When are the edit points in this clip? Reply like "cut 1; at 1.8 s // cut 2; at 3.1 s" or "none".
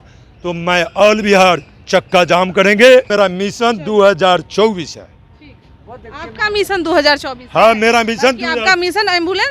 cut 1; at 3.1 s